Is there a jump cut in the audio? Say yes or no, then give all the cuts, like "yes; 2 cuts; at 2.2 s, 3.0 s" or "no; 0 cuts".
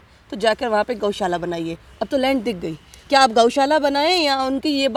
no; 0 cuts